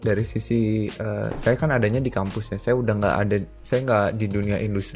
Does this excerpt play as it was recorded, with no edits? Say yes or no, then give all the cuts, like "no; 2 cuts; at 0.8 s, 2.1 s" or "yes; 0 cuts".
yes; 0 cuts